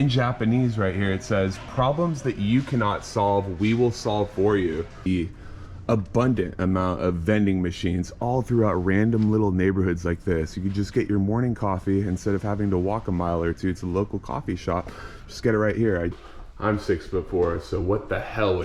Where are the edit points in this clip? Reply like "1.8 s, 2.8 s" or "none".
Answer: 5.1 s, 16.1 s